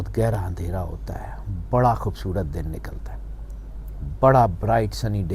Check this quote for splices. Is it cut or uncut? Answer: uncut